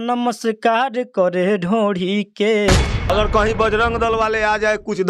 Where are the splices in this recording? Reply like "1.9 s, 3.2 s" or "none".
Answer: 3.1 s

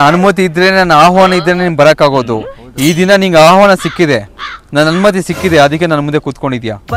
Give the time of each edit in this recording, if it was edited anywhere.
none

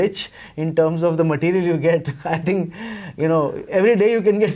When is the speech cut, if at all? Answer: none

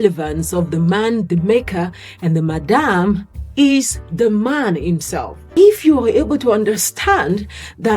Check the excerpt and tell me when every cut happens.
5.4 s

